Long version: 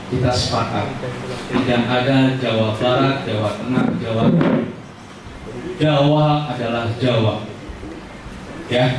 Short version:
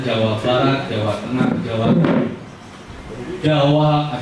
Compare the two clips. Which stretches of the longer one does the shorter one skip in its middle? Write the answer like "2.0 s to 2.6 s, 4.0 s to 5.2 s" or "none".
none